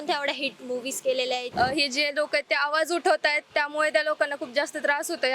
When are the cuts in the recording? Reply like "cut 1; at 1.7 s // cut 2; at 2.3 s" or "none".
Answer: cut 1; at 1.5 s